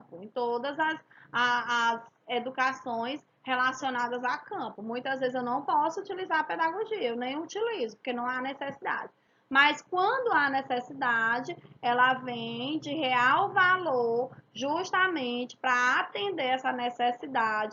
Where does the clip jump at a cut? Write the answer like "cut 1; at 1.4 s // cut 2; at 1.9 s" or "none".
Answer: cut 1; at 14.9 s